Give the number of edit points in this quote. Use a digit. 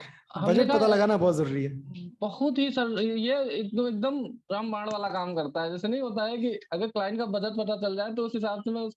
0